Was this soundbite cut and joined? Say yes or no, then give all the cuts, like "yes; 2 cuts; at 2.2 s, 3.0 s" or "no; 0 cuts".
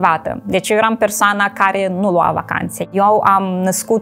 yes; 1 cut; at 2.9 s